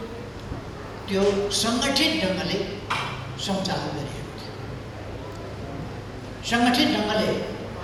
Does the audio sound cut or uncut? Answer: uncut